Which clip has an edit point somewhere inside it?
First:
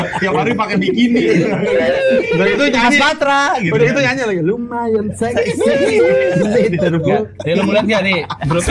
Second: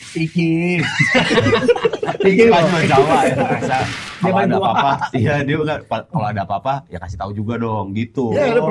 second; 1 cut; at 3.6 s

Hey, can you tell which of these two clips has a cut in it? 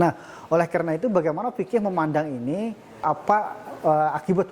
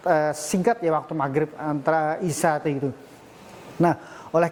first; 1 cut; at 3.0 s

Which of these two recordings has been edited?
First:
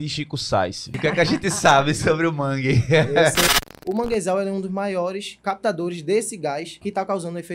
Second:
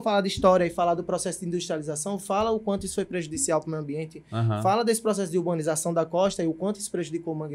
first; 4 cuts; at 0.9 s, 3.5 s, 5.3 s, 6.7 s

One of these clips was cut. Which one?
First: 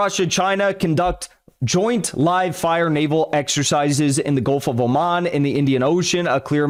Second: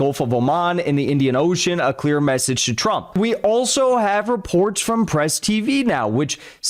second; 1 cut; at 3.2 s

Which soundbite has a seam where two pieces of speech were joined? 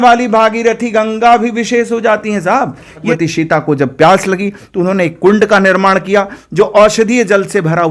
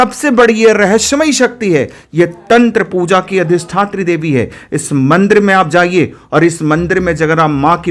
first; 1 cut; at 3.0 s

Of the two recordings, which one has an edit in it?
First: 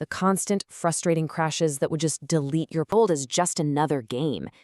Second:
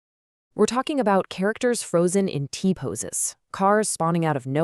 first; 1 cut; at 2.9 s

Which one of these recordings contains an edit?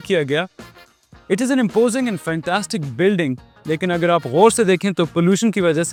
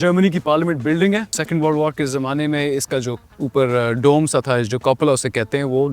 second; 1 cut; at 1.4 s

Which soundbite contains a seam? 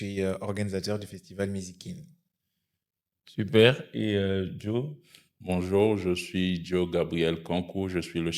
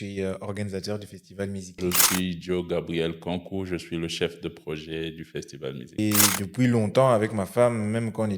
second; 2 cuts; at 1.8 s, 6.0 s

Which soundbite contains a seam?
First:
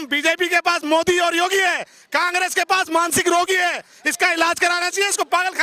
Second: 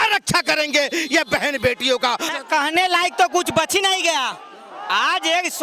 second; 1 cut; at 2.3 s

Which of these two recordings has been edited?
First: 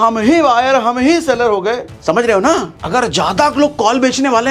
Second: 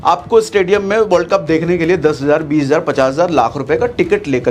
first; 2 cuts; at 1.9 s, 2.8 s

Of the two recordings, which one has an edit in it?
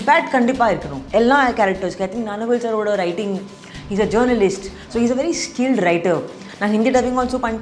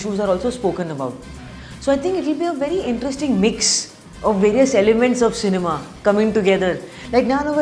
first; 2 cuts; at 0.9 s, 6.4 s

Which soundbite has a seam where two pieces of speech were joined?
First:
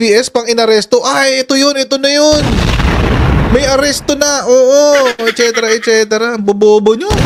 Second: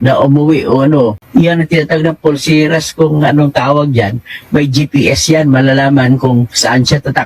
second; 1 cut; at 1.2 s

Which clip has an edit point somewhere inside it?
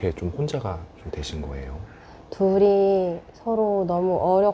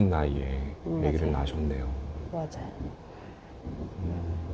first; 1 cut; at 2.0 s

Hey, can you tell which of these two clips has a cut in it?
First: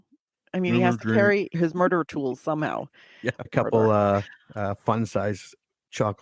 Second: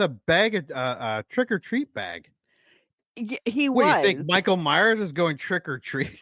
first; 2 cuts; at 1.5 s, 3.5 s

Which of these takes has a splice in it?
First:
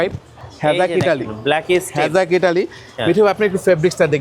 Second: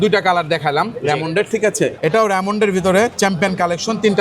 second; 1 cut; at 2.0 s

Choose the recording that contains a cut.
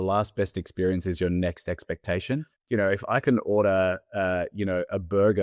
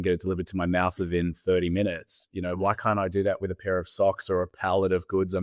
first; 1 cut; at 2.5 s

